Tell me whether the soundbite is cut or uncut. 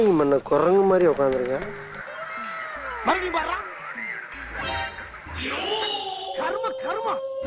uncut